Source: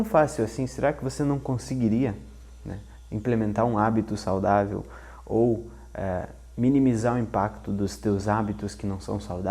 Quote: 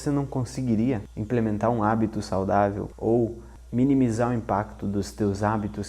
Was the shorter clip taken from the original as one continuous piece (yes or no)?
no